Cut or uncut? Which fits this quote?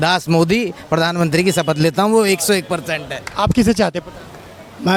uncut